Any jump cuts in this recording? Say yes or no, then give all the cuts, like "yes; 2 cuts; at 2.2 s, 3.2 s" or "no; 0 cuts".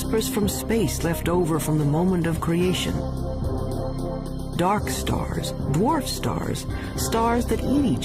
no; 0 cuts